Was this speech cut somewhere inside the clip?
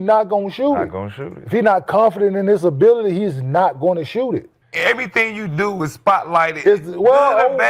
yes; 1 cut; at 4.6 s

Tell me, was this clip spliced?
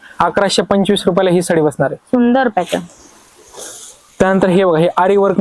no; 0 cuts

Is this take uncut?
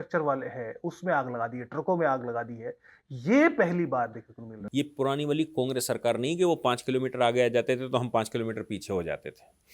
no; 1 cut; at 4.6 s

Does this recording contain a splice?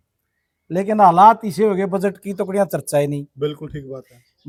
no; 0 cuts

